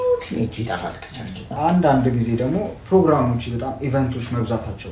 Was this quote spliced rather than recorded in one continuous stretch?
yes; 1 cut; at 1.5 s

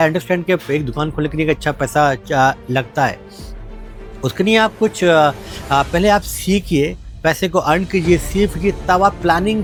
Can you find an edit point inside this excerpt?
no; 0 cuts

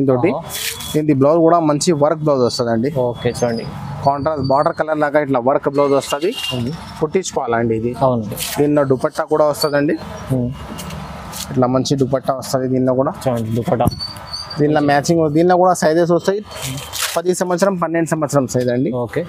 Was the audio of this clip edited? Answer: no; 0 cuts

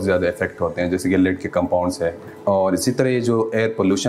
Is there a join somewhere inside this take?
yes; 1 cut; at 2.2 s

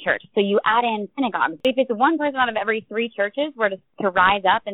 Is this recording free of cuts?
no; 1 cut; at 1.6 s

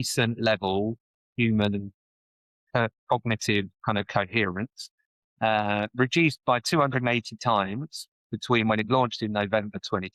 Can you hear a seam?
no; 0 cuts

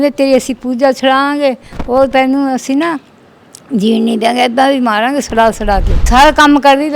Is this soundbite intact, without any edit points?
no; 1 cut; at 5.9 s

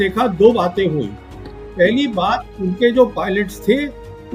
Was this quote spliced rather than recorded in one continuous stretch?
no; 0 cuts

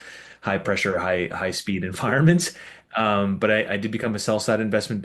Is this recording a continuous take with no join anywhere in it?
yes; 0 cuts

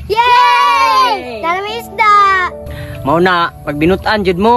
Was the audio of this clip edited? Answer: yes; 1 cut; at 2.8 s

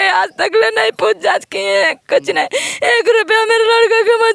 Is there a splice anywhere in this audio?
no; 0 cuts

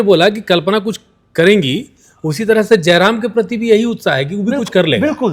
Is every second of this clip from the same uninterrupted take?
yes; 0 cuts

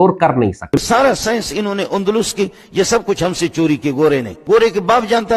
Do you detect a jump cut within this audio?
yes; 2 cuts; at 0.7 s, 4.3 s

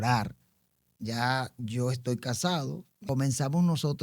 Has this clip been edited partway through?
yes; 1 cut; at 2.9 s

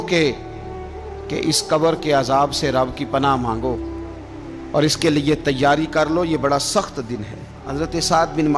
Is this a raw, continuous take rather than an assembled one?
no; 1 cut; at 7.6 s

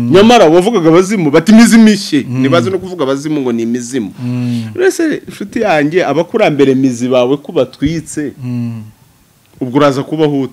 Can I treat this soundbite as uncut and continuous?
yes; 0 cuts

